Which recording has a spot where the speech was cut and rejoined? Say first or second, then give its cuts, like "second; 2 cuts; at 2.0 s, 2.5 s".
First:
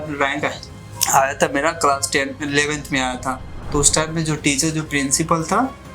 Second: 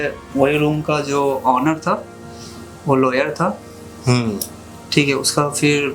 first; 1 cut; at 3.5 s